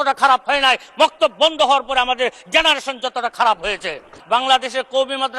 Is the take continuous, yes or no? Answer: no